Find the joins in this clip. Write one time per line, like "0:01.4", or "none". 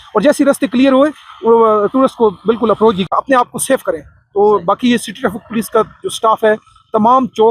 0:03.1